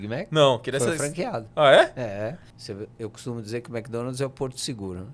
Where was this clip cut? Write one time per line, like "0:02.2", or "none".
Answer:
0:02.5